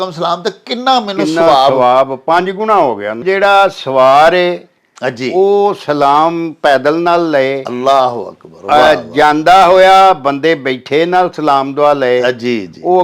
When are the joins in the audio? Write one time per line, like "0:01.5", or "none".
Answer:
0:03.2